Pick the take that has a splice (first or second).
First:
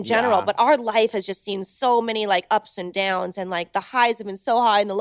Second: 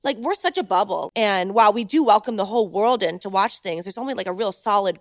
second